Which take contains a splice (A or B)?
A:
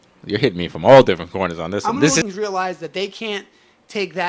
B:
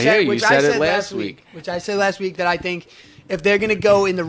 A